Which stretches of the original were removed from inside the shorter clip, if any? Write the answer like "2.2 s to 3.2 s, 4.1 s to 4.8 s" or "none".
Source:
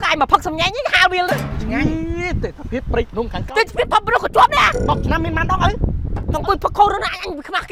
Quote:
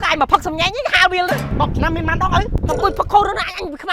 1.5 s to 4.8 s, 5.8 s to 6.2 s